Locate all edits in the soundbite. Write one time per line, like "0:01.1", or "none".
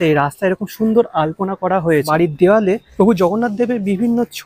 0:02.1
0:02.9